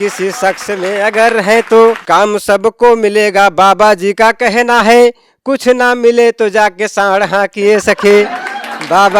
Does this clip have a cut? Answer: yes; 1 cut; at 2.0 s

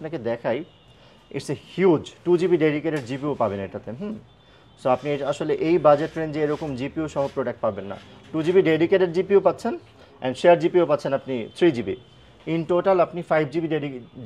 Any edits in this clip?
no; 0 cuts

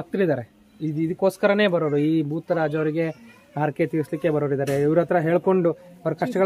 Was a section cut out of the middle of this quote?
no; 0 cuts

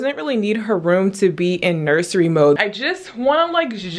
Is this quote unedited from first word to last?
no; 1 cut; at 2.6 s

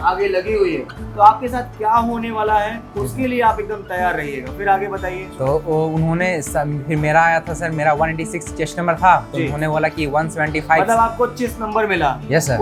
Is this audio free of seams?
yes; 0 cuts

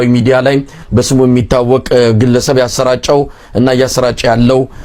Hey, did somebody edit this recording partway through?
no; 0 cuts

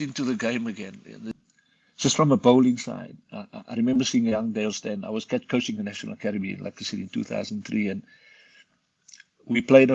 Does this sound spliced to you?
yes; 1 cut; at 1.3 s

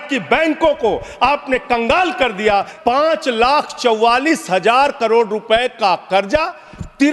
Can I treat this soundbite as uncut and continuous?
no; 1 cut; at 2.7 s

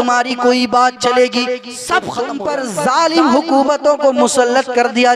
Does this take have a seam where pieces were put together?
yes; 1 cut; at 2.2 s

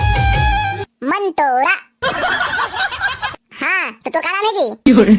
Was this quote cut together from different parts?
no; 0 cuts

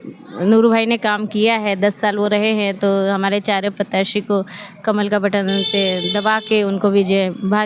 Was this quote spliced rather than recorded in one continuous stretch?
no; 0 cuts

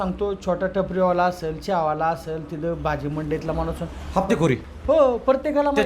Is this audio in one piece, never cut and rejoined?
no; 1 cut; at 4.7 s

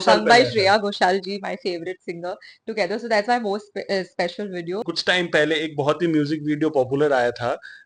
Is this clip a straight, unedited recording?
no; 1 cut; at 4.8 s

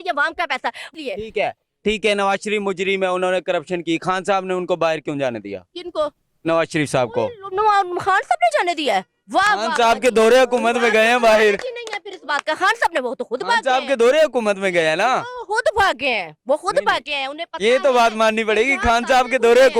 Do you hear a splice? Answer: yes; 1 cut; at 0.9 s

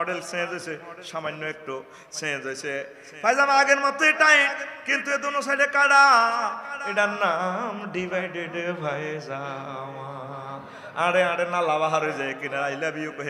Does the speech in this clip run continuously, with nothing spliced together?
yes; 0 cuts

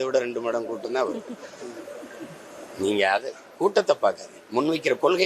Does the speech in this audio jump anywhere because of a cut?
no; 0 cuts

